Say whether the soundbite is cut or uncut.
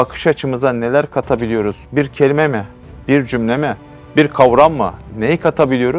uncut